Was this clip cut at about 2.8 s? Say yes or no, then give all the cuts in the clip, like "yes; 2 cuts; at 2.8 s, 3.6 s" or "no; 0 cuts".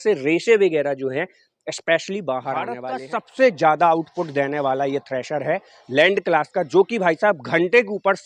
yes; 1 cut; at 2.8 s